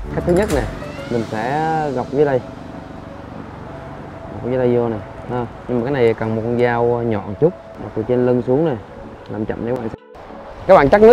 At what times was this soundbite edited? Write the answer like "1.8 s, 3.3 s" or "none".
10.0 s

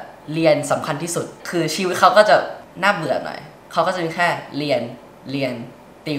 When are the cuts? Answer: 1.3 s, 2.6 s

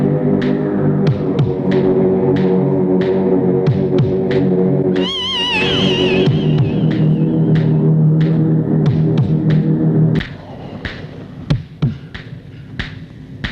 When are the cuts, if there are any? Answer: 10.2 s

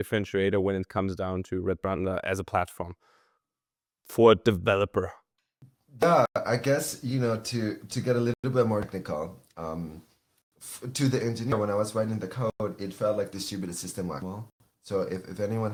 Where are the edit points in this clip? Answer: none

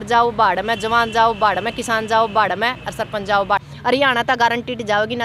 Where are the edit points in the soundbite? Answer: 3.9 s

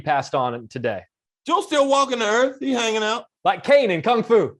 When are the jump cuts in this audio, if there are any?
none

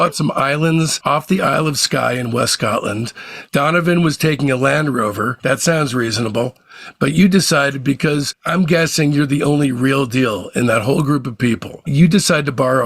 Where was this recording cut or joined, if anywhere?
3.4 s

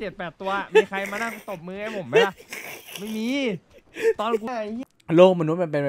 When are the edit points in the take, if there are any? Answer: 4.5 s

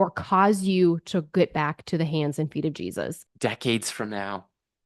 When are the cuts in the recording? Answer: 3.2 s

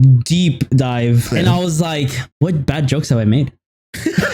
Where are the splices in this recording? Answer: 1.3 s, 2.2 s

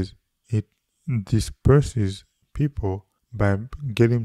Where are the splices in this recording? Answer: 3.2 s

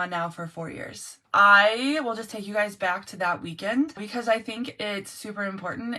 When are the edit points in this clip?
1.2 s, 4.1 s

